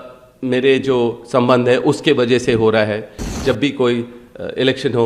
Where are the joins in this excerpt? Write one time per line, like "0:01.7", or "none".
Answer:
0:03.2